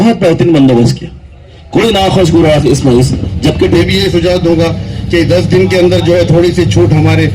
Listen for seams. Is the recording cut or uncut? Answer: cut